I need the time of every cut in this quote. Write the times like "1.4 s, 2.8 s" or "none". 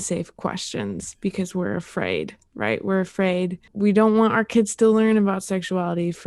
3.7 s

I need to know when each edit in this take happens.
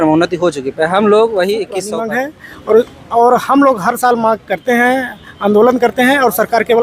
1.9 s

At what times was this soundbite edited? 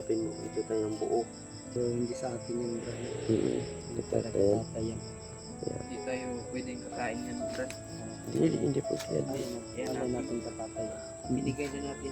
1.7 s

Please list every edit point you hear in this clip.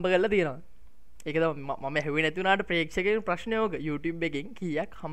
none

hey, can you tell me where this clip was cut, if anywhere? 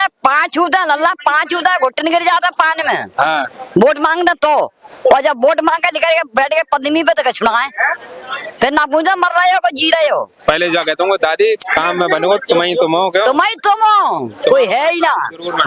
none

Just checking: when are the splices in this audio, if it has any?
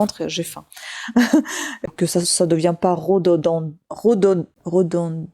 1.8 s

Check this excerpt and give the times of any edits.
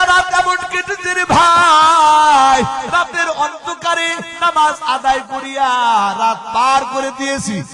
4.3 s

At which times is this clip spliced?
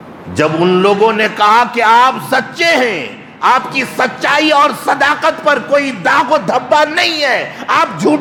none

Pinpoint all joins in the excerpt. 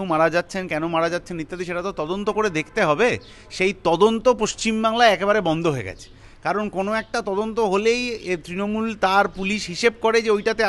none

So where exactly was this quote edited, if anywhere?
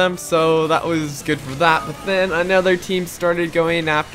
none

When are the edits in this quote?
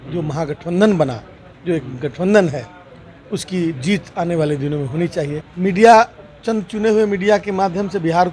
5.4 s

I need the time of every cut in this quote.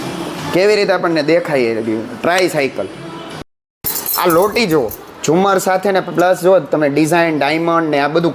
3.3 s

